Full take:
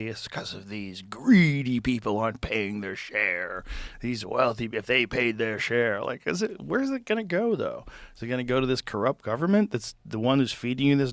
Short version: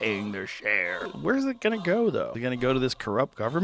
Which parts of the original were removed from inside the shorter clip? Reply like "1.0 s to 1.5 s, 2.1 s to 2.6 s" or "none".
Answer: 3.6 s to 6.6 s, 7.8 s to 8.2 s

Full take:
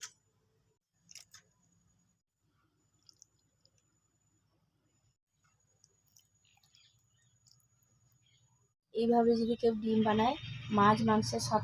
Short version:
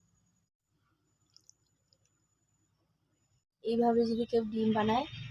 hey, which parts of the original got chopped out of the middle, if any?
5.2 s to 8.8 s

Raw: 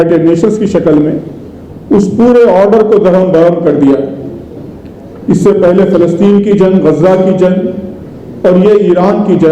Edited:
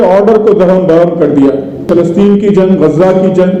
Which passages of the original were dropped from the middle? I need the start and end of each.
4.3 s to 5.9 s

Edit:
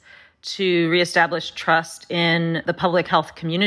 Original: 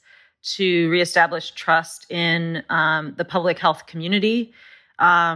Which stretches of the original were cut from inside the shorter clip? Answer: 2.6 s to 3.1 s

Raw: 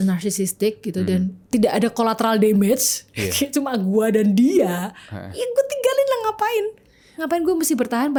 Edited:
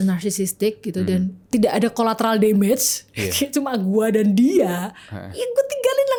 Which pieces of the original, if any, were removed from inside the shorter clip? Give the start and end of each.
none

